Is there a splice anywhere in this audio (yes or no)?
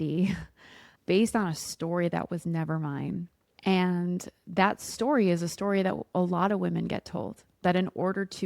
yes